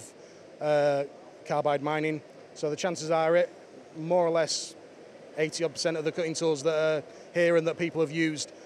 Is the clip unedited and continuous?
yes; 0 cuts

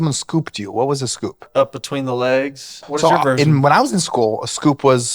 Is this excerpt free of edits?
no; 2 cuts; at 1.4 s, 2.8 s

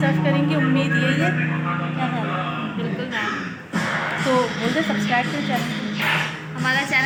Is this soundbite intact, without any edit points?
yes; 0 cuts

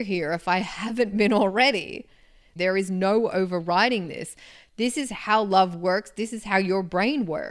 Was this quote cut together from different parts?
yes; 1 cut; at 2.4 s

